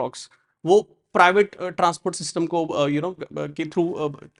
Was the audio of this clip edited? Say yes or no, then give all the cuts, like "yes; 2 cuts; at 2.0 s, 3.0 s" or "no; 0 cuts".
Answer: no; 0 cuts